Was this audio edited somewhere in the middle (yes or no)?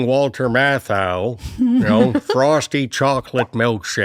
no